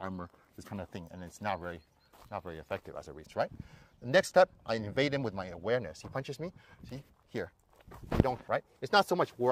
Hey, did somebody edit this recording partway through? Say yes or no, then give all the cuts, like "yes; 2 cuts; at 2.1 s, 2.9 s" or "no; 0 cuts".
yes; 2 cuts; at 3.2 s, 8.4 s